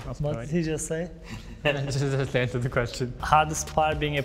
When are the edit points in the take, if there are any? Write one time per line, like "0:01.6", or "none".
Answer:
none